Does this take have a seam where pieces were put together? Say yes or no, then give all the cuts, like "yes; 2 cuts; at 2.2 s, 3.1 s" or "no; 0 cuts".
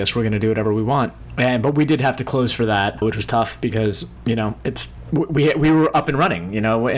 yes; 4 cuts; at 1.2 s, 2.9 s, 4.1 s, 4.9 s